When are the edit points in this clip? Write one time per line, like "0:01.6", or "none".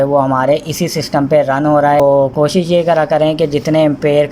0:02.0